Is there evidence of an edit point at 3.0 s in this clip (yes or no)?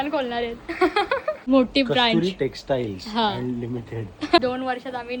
no